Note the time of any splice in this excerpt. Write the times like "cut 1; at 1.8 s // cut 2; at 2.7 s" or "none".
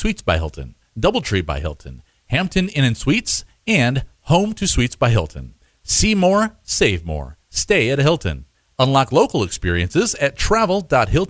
none